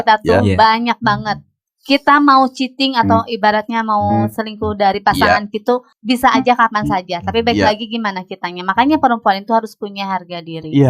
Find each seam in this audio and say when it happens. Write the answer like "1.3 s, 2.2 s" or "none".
5.9 s